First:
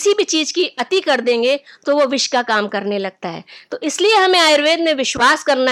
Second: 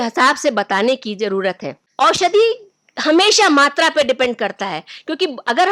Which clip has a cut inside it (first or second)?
second